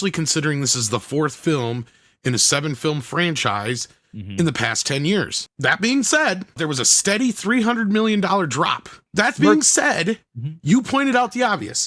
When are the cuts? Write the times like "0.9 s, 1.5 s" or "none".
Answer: 5.4 s, 6.6 s, 9.0 s